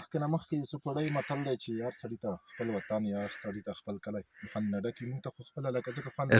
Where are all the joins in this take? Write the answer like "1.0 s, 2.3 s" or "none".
none